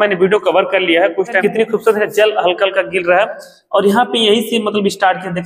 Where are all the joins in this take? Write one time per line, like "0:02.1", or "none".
0:01.4